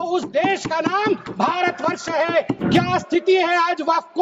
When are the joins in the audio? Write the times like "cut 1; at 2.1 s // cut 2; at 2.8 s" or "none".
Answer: cut 1; at 2.5 s